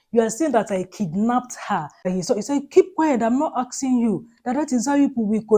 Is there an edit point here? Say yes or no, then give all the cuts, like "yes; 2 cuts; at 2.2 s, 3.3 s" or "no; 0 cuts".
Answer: yes; 1 cut; at 2.1 s